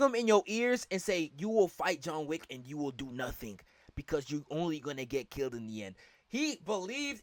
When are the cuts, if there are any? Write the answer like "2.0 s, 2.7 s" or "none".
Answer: none